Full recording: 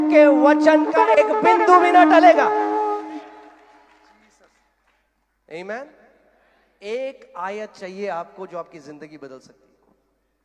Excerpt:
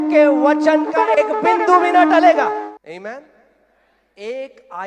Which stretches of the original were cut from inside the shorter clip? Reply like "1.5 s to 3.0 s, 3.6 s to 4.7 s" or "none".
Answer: 2.6 s to 5.3 s